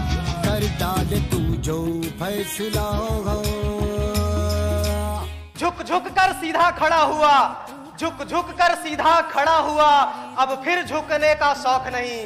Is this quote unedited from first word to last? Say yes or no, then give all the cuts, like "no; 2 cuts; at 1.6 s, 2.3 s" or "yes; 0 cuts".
yes; 0 cuts